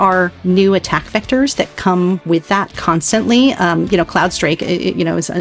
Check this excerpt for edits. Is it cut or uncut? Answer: uncut